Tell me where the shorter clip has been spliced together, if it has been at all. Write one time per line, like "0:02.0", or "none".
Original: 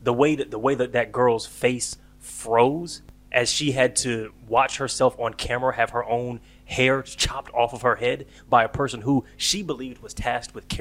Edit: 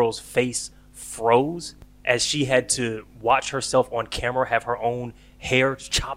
none